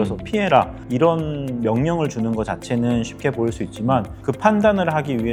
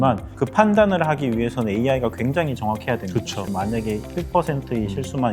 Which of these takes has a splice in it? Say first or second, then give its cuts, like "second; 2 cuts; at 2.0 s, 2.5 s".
second; 1 cut; at 3.4 s